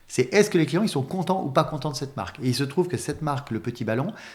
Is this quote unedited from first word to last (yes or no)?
yes